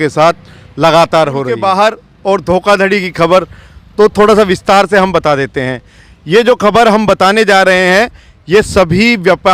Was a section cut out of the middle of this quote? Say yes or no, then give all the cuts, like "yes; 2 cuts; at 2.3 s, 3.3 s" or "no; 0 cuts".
yes; 1 cut; at 1.6 s